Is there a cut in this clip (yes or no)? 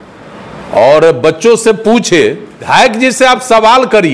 yes